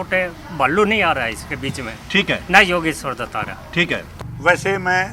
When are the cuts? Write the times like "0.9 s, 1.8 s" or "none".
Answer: 4.1 s